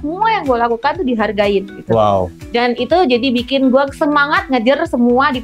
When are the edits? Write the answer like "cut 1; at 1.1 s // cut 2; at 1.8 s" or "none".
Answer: none